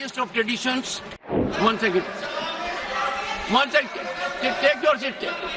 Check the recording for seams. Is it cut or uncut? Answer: cut